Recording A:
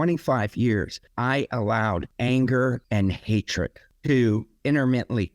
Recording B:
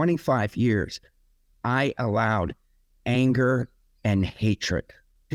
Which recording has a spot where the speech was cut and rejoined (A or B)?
A